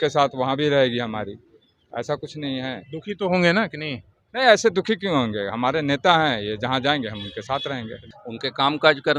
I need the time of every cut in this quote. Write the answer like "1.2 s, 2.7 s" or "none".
8.0 s